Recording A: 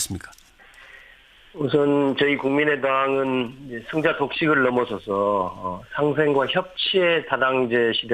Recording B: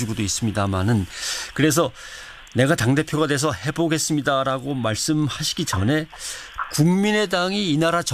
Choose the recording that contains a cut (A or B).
A